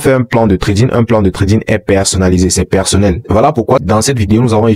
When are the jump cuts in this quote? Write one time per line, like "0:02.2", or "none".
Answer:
0:03.2

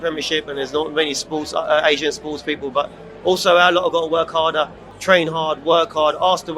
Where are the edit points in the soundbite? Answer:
0:04.9

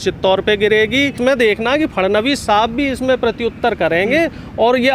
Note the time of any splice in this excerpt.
0:01.2

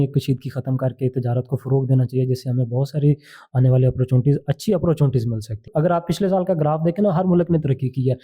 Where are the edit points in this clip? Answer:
0:05.6

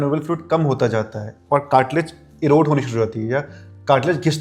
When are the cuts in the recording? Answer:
none

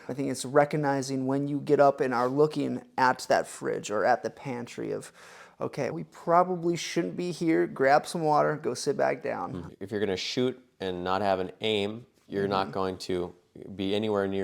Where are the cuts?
0:09.7

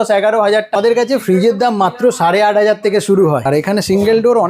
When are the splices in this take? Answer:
0:00.8
0:03.5

